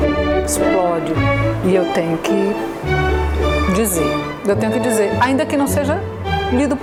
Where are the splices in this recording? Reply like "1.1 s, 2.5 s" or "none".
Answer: none